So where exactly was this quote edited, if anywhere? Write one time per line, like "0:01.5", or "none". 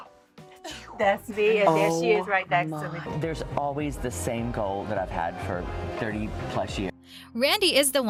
none